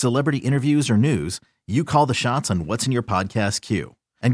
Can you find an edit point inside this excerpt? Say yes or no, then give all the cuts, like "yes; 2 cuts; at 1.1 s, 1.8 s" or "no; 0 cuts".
no; 0 cuts